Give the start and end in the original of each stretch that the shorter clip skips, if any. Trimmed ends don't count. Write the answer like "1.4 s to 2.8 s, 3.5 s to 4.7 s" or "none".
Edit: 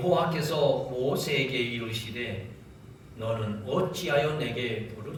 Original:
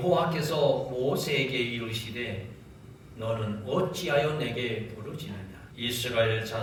none